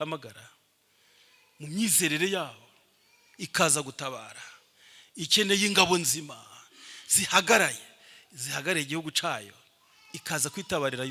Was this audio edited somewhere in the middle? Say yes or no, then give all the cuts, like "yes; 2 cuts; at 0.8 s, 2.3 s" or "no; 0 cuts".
no; 0 cuts